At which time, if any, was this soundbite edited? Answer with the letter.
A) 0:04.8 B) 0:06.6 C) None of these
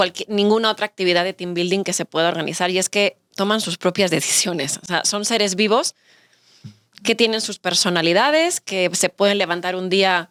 C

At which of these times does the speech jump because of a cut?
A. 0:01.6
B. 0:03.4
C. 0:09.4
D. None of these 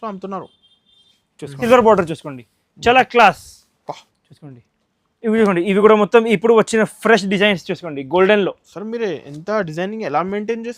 A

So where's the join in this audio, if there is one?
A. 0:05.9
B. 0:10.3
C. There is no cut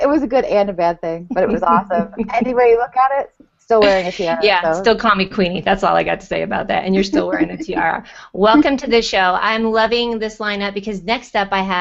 C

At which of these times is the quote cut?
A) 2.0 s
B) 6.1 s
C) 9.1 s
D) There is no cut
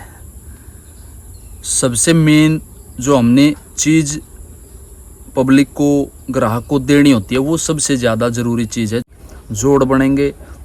C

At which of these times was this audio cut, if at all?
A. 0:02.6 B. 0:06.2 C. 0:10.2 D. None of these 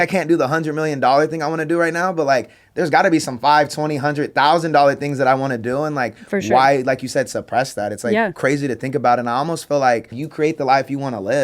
C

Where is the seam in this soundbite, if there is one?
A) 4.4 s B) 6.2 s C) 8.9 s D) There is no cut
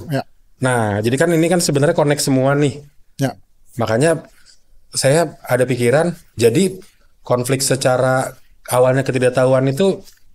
B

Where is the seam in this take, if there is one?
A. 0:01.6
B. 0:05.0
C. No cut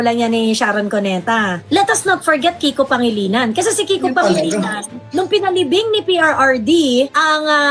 A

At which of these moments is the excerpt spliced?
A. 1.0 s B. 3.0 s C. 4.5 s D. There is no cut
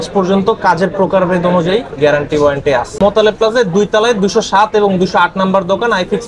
B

